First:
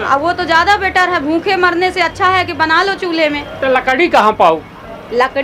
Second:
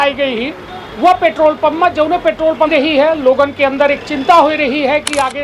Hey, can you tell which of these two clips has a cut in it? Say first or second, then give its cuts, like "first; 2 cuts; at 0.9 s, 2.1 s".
second; 1 cut; at 2.7 s